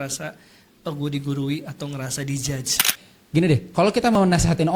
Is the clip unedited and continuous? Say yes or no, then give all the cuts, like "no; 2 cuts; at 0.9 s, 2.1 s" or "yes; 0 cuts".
no; 1 cut; at 3.0 s